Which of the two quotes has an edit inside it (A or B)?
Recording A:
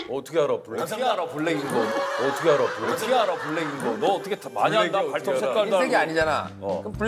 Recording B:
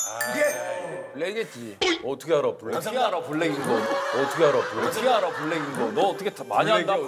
B